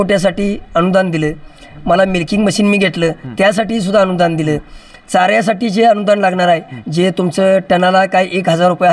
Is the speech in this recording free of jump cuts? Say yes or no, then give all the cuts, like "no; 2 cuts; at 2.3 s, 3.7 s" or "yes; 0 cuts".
yes; 0 cuts